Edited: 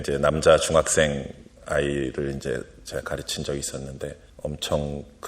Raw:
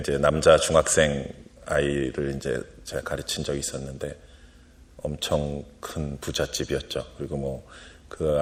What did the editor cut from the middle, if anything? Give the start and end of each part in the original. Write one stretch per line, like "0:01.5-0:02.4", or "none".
0:04.3-0:04.9